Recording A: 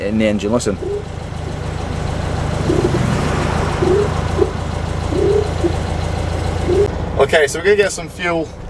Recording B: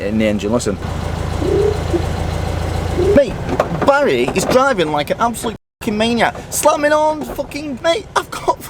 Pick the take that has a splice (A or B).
B